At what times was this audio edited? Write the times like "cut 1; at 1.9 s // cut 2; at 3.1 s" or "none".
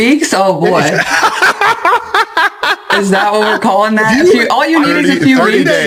none